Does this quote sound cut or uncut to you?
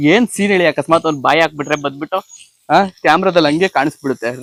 uncut